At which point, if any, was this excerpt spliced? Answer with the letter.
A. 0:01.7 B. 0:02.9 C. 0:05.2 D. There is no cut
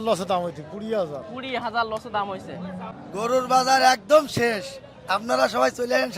B